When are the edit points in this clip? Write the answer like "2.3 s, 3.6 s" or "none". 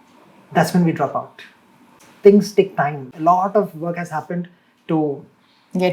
2.0 s